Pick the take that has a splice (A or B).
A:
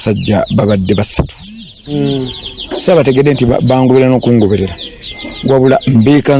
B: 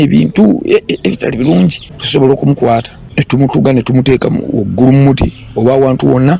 B